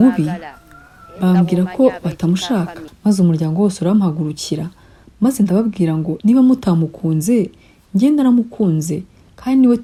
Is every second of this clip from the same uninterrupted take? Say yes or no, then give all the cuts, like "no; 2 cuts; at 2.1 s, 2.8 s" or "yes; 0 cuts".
yes; 0 cuts